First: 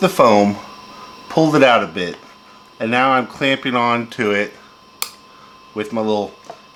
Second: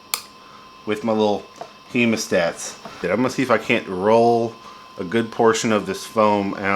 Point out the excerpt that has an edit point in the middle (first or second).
second